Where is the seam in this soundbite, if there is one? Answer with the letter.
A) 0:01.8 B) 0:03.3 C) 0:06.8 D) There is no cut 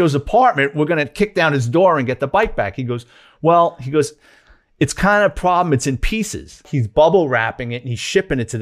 C